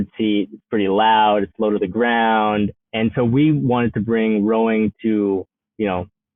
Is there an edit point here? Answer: no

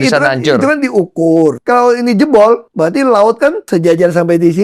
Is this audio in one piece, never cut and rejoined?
no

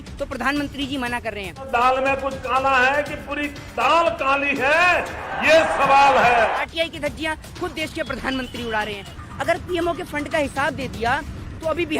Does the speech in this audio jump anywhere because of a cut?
yes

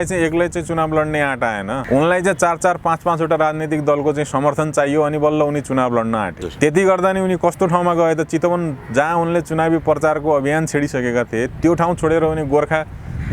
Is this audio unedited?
no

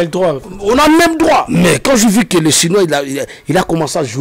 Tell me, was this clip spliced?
yes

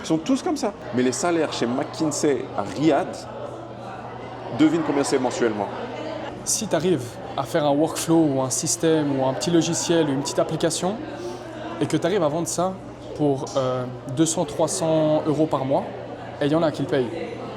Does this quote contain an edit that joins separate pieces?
yes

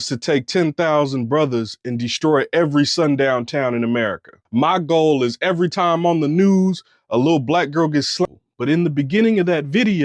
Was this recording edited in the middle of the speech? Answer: yes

